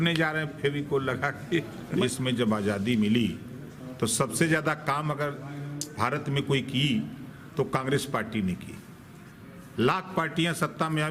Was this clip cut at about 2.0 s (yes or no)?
yes